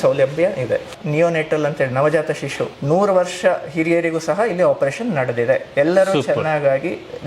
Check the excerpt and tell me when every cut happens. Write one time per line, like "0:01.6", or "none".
0:01.0
0:02.7